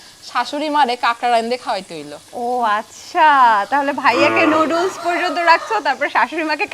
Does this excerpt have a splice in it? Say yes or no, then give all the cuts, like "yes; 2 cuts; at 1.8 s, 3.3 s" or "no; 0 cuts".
no; 0 cuts